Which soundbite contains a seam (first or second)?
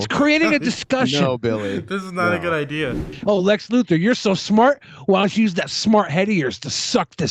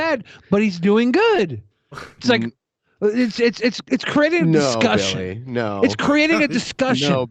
first